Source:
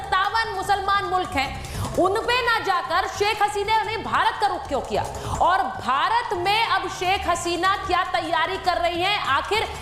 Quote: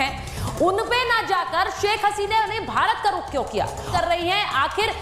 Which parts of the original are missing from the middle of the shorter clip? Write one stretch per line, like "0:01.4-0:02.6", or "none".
0:05.2-0:08.6